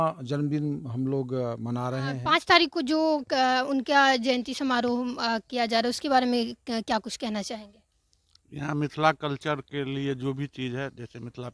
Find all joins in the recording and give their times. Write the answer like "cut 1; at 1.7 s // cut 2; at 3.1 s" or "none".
cut 1; at 2.2 s